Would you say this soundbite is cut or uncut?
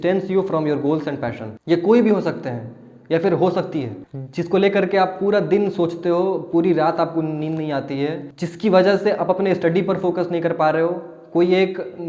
uncut